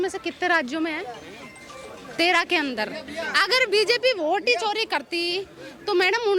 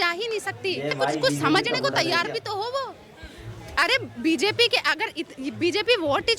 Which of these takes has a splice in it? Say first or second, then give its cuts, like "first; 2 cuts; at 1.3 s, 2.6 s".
second; 1 cut; at 1.0 s